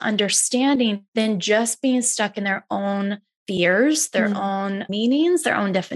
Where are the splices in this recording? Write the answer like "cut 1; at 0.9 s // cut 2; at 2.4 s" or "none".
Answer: cut 1; at 1.0 s // cut 2; at 4.9 s